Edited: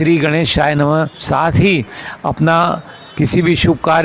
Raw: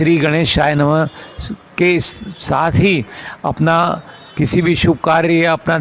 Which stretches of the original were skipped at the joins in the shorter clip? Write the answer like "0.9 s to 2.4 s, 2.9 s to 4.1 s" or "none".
1.2 s to 2.4 s